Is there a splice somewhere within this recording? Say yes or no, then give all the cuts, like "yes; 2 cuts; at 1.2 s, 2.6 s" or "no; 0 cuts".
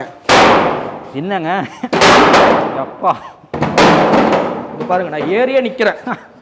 no; 0 cuts